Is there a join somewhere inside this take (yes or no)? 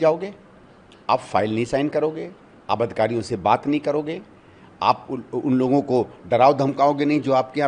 no